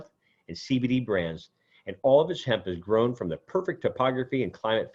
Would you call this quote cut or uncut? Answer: uncut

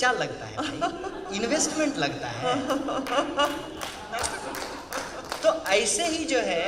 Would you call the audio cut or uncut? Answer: uncut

